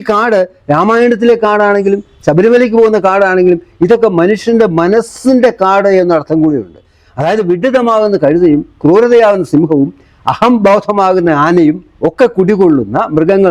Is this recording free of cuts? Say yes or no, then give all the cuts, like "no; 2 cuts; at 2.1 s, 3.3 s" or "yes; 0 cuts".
yes; 0 cuts